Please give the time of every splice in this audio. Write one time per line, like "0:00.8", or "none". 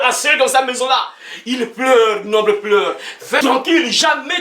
0:03.4

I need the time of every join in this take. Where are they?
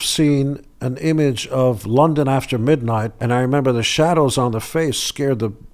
0:03.1

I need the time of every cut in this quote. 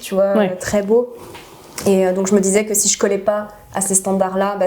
none

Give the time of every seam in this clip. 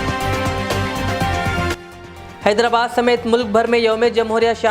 0:01.7

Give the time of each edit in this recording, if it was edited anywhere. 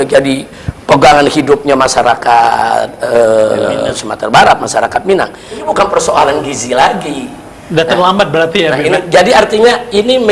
0:05.6

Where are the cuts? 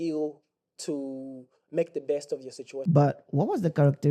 0:02.7

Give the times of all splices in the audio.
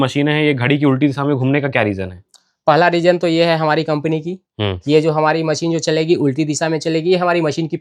none

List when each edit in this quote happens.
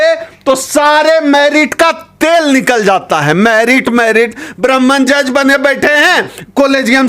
none

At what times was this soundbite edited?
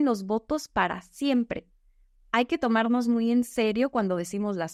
none

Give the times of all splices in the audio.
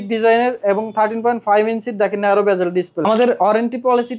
0:03.0

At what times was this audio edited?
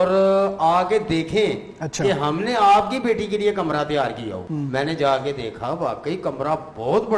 0:04.4

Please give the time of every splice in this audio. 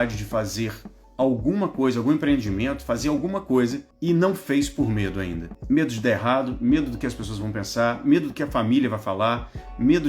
0:03.9
0:05.5

